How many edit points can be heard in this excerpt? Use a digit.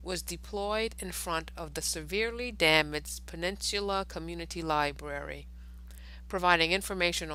0